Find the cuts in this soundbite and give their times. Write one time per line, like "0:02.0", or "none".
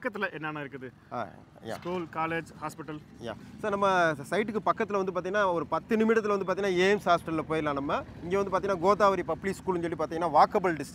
none

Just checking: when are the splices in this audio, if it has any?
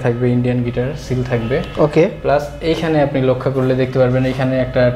none

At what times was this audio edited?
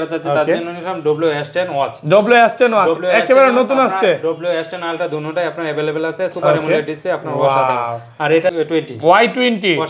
0:08.5

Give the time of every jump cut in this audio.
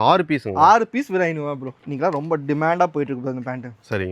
0:01.7

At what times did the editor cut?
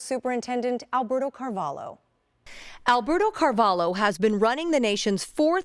0:02.5

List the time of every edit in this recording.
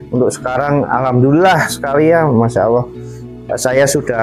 none

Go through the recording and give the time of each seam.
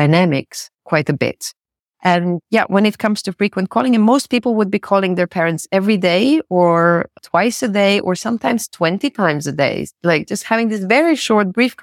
none

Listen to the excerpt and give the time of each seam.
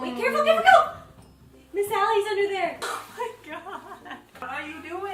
none

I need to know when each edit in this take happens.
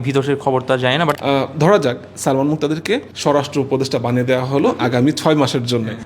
0:01.1

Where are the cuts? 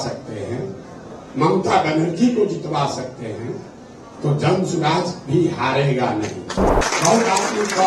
0:06.8

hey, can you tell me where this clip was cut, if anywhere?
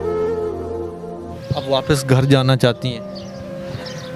0:01.3

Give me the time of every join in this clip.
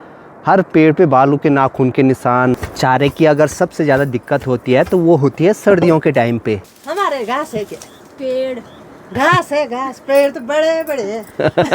0:02.6
0:06.7

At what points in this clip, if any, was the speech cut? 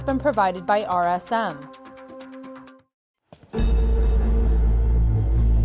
0:01.6
0:02.7

